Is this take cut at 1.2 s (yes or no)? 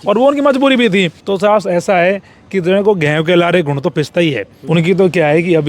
yes